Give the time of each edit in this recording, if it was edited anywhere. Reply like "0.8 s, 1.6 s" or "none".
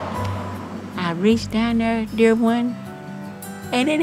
none